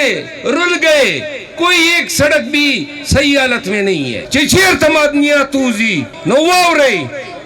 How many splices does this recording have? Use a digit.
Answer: 2